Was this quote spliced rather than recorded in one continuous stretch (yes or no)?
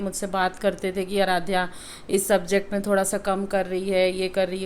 no